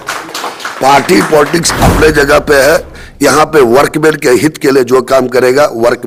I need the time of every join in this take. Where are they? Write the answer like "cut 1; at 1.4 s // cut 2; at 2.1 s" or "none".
none